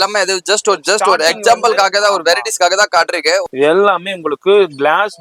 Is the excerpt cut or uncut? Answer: cut